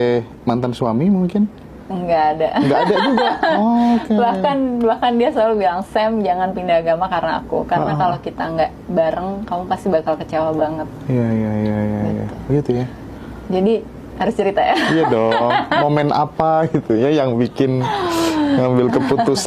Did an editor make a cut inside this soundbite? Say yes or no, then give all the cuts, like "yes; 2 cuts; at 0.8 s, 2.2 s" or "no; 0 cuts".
no; 0 cuts